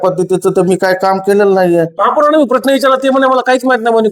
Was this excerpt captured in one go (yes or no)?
no